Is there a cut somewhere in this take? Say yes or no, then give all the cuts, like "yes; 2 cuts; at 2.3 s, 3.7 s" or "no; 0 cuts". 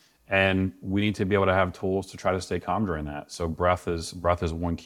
no; 0 cuts